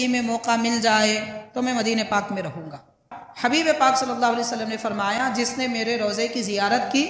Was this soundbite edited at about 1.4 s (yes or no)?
no